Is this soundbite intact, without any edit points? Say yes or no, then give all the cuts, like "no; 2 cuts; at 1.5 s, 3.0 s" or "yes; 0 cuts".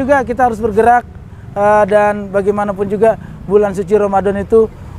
yes; 0 cuts